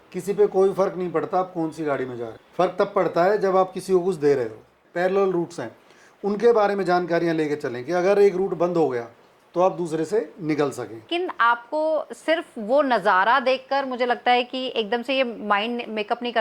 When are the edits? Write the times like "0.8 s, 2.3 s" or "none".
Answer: 2.4 s, 4.8 s, 11.1 s